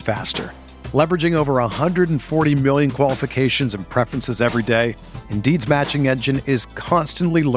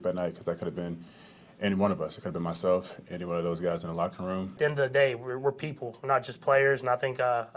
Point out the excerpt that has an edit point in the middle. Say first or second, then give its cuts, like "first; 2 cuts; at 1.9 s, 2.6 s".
second; 1 cut; at 4.5 s